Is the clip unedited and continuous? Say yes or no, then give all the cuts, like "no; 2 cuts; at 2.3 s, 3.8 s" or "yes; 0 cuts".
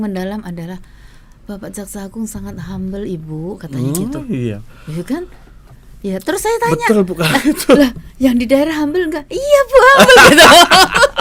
yes; 0 cuts